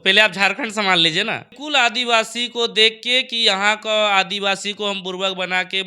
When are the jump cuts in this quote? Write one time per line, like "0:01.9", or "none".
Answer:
0:01.6